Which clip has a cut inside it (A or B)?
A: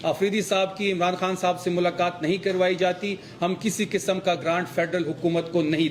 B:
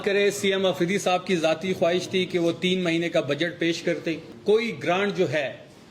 B